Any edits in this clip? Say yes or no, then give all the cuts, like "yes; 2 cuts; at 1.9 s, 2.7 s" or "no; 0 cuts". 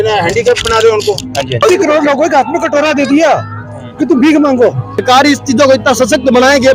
yes; 2 cuts; at 1.6 s, 5.0 s